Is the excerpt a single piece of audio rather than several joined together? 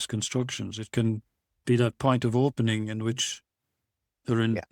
yes; 0 cuts

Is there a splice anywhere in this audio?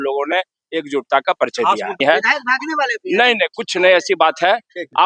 yes; 1 cut; at 2.0 s

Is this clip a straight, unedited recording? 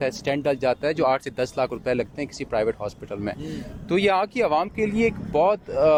yes; 0 cuts

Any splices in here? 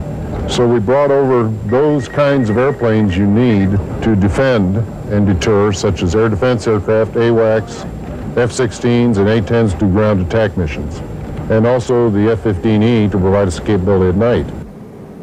yes; 1 cut; at 1.2 s

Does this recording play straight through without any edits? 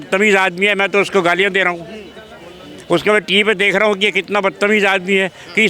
yes; 0 cuts

